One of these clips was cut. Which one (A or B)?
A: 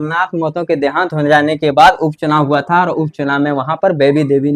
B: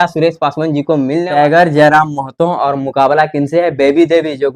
B